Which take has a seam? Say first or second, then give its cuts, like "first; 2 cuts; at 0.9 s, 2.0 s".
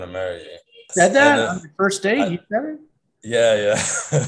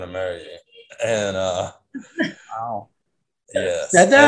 first; 1 cut; at 0.9 s